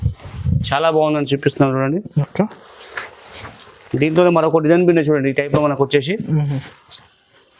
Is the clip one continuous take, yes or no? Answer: yes